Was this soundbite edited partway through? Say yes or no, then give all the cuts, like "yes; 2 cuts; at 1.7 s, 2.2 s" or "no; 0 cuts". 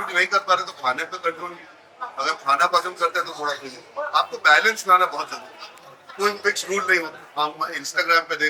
no; 0 cuts